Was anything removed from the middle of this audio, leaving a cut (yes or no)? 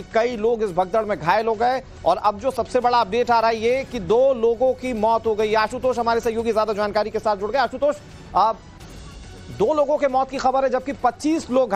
no